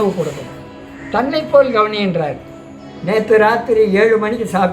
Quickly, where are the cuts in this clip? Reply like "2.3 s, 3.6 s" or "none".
2.9 s